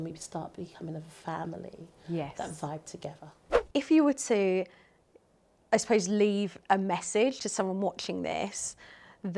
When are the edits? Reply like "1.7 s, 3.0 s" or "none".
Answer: 3.6 s

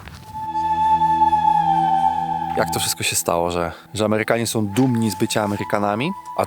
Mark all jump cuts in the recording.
2.6 s

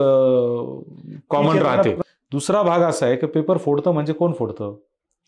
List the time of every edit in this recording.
2.0 s

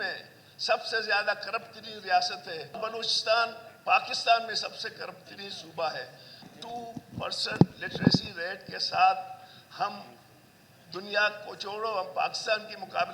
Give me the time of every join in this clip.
2.8 s, 6.5 s

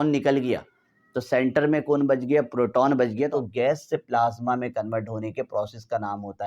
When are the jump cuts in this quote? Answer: 3.3 s

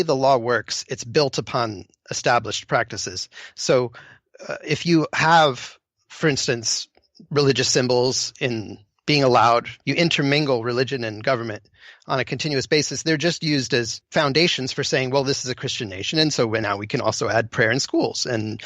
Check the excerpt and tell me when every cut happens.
9.8 s, 14.0 s

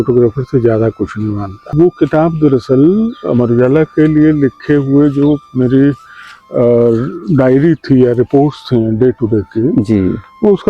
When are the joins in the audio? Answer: 1.7 s

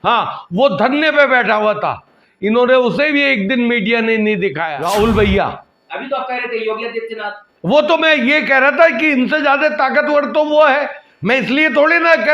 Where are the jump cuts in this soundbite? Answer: 4.7 s

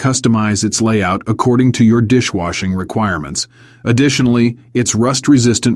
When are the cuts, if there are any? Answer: none

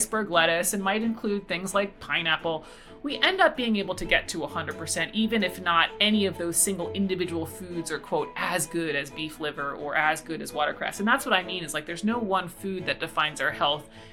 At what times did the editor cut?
none

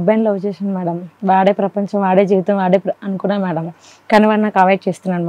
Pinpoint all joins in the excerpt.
none

